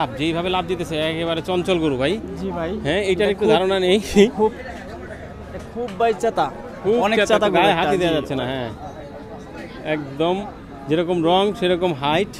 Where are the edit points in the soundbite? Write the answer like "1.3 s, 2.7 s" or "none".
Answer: none